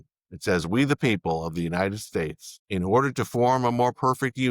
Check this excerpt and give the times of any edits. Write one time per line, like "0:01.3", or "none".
0:02.5